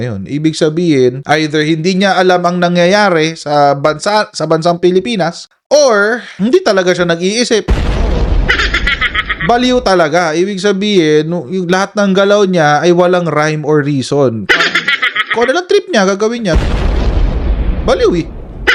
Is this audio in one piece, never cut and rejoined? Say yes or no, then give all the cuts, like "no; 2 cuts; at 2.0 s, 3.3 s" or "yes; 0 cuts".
yes; 0 cuts